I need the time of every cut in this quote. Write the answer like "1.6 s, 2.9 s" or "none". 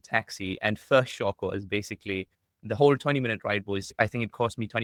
none